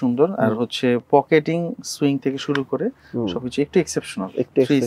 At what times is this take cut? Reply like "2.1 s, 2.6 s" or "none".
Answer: none